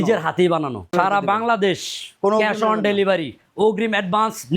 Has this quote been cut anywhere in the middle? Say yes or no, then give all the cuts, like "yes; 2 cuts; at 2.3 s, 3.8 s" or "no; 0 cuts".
yes; 1 cut; at 0.9 s